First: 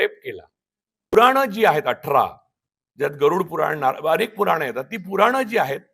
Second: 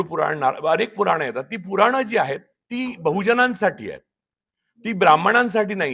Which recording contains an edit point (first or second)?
first